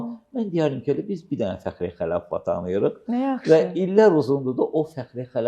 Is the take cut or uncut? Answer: uncut